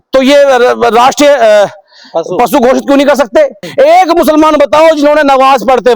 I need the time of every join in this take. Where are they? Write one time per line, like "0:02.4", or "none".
0:03.6